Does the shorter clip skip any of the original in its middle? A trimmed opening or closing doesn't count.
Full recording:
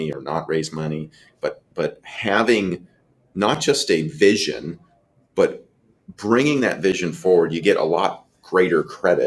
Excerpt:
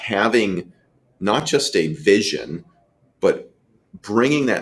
no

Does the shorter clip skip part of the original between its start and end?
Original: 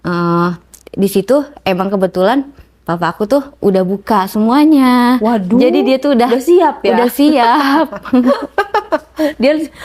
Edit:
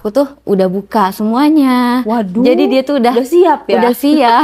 no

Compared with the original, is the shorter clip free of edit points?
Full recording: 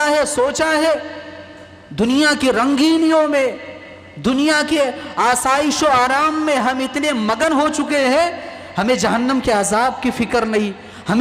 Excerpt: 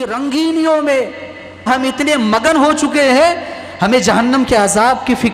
no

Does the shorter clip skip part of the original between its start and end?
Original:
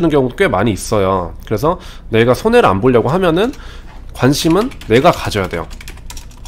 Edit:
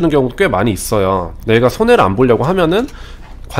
yes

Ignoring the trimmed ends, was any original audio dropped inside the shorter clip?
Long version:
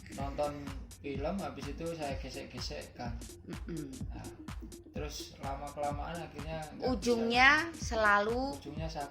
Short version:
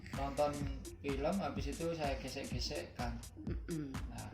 no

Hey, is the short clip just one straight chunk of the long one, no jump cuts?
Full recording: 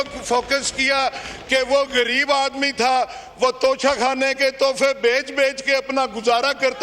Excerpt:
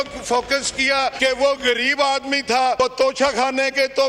no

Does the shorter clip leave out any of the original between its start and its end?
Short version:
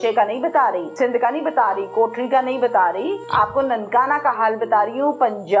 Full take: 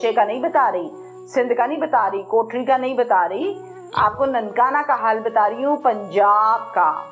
yes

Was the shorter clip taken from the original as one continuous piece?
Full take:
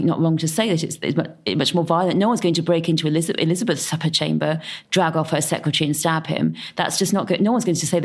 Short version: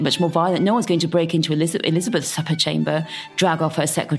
yes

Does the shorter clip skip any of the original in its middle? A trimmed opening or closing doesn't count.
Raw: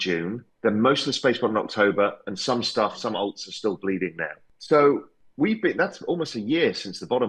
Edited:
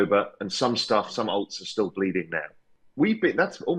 yes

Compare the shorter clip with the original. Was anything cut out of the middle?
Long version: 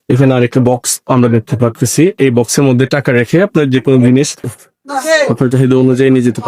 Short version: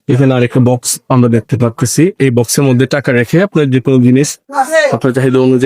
yes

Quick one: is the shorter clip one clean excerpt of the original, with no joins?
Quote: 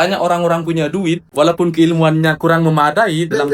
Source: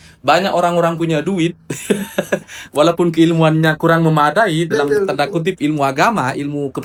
no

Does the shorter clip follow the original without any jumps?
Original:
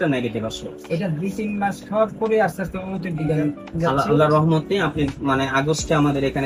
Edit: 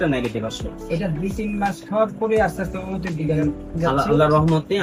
yes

